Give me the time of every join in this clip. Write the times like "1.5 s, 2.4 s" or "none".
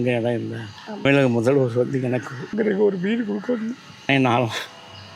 1.0 s, 2.5 s, 3.9 s